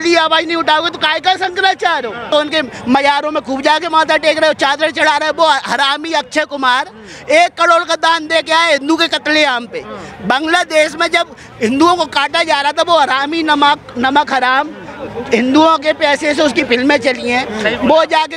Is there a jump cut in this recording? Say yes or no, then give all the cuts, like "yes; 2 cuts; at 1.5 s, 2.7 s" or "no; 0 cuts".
yes; 1 cut; at 2.2 s